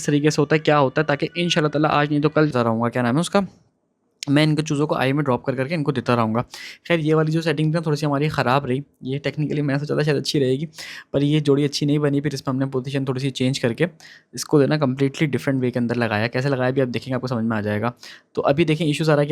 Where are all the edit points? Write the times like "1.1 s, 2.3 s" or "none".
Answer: 2.5 s